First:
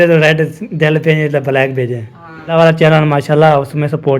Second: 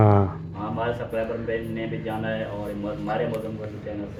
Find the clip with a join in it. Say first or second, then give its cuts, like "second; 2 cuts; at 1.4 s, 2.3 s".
first; 1 cut; at 2.5 s